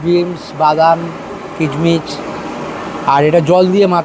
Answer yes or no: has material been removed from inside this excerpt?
no